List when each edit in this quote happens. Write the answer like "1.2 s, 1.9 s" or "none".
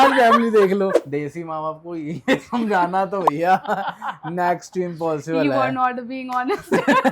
1.0 s